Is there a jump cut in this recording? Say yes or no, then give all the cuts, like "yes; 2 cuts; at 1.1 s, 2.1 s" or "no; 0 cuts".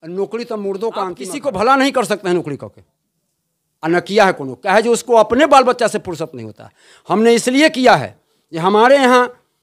yes; 1 cut; at 1.3 s